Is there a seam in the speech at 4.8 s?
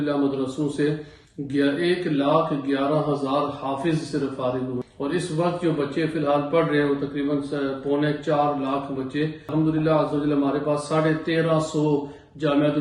yes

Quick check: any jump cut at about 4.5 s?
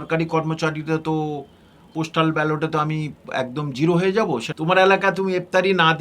yes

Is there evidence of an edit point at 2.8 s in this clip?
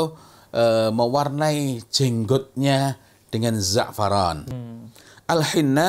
no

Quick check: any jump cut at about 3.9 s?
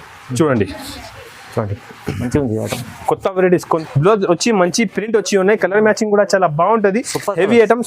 yes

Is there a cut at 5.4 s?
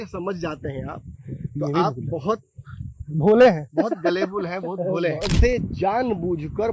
yes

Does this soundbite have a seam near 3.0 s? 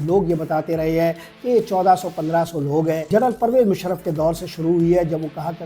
yes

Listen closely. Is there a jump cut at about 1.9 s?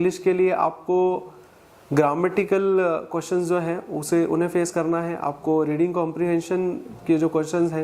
no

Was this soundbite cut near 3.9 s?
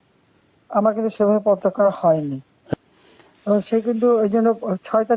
no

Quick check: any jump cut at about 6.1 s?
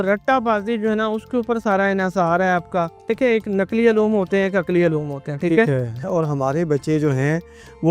yes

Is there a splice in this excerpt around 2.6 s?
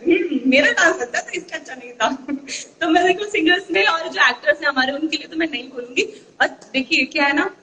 no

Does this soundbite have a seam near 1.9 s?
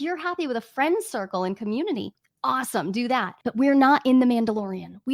no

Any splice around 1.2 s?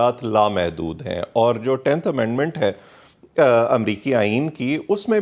no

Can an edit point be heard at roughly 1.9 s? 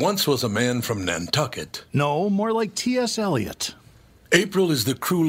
no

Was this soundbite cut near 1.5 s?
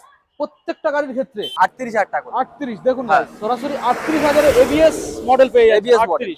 yes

